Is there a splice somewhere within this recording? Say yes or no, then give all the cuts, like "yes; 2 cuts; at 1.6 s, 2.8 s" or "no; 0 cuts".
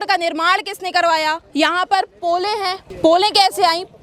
yes; 2 cuts; at 1.4 s, 2.8 s